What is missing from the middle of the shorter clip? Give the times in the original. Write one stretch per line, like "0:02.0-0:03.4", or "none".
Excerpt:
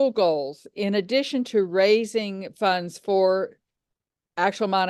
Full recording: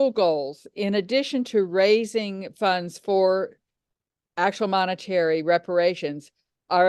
none